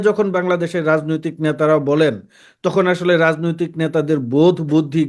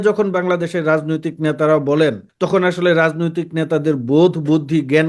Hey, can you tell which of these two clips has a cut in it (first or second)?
second